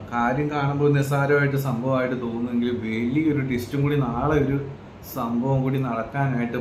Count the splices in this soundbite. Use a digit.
0